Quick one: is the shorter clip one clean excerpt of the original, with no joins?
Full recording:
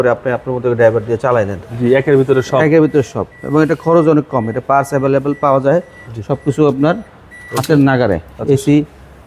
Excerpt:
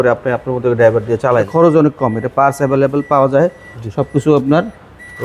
no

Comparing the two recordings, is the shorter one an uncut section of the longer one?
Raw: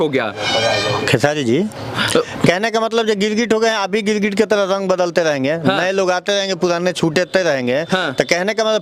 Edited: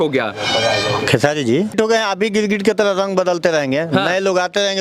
no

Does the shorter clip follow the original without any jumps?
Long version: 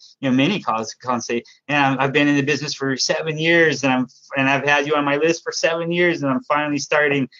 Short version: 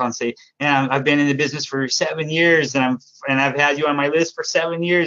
yes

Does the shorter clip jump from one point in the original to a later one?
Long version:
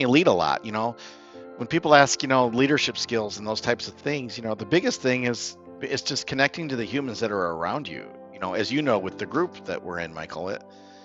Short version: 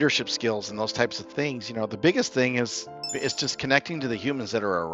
no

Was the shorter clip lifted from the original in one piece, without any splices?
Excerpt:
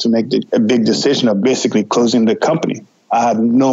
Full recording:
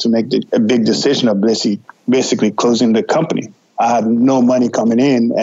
no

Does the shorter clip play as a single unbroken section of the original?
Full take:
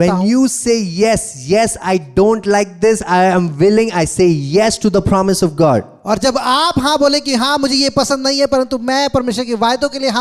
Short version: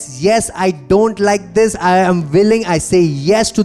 yes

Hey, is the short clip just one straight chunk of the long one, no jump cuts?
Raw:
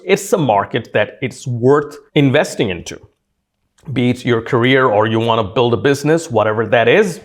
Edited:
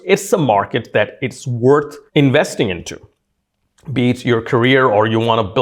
yes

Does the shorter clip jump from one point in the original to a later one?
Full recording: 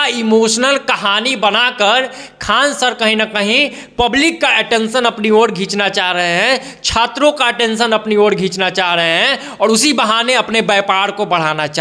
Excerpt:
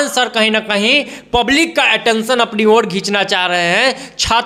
no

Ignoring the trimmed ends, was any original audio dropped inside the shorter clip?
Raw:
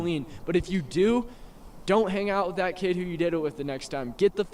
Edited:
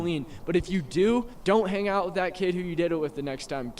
yes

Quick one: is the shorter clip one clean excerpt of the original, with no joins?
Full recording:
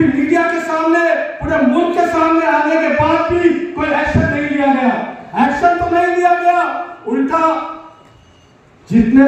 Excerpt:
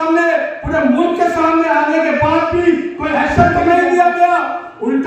no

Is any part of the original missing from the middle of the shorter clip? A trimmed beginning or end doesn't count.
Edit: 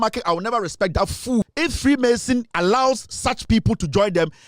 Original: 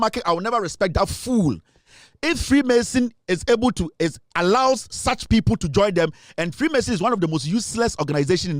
yes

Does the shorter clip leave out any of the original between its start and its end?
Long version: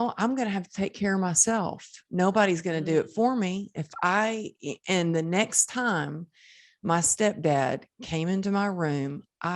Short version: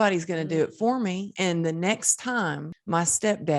yes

